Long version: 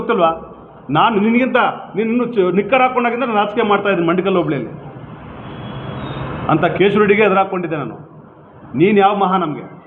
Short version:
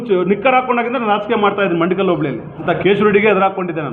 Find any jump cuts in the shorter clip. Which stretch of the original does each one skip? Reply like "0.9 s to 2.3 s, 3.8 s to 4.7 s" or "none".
4.9 s to 6.6 s